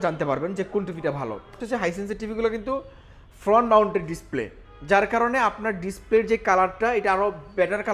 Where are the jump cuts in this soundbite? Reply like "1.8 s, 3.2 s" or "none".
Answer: 1.6 s